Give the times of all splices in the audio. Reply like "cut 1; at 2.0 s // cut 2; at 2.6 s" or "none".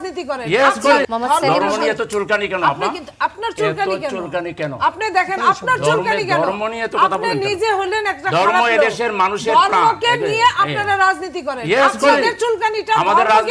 cut 1; at 1.0 s

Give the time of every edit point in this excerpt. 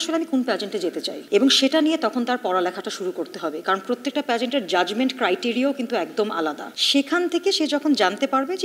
none

